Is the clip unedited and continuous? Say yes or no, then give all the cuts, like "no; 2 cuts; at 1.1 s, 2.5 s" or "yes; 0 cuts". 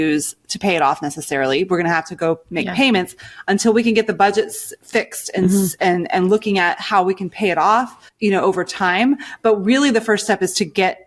no; 1 cut; at 8.0 s